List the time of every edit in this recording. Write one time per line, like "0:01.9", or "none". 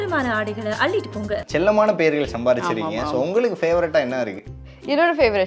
0:01.4